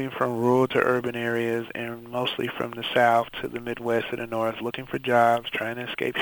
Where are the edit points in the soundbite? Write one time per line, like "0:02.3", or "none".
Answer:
none